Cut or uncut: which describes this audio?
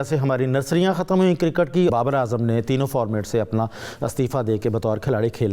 cut